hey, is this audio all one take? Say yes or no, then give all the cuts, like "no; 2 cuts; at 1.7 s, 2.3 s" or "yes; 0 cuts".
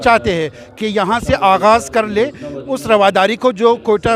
yes; 0 cuts